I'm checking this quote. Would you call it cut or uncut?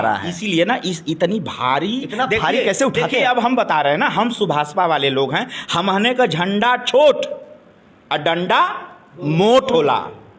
uncut